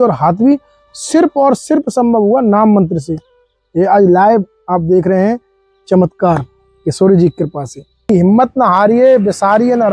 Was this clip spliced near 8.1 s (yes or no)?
yes